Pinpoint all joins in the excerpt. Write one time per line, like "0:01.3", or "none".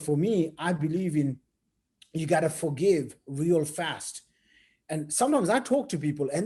none